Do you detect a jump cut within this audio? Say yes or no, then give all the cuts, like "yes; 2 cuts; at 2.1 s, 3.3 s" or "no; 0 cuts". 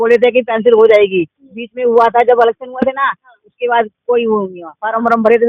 no; 0 cuts